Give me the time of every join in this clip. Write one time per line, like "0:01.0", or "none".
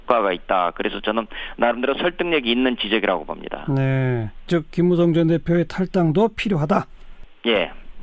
none